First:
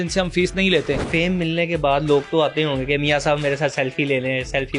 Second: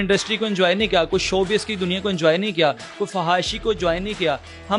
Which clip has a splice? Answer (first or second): first